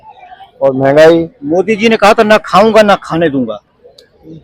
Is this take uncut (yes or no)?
yes